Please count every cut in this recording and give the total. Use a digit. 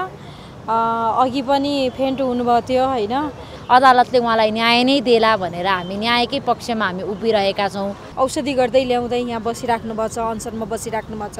2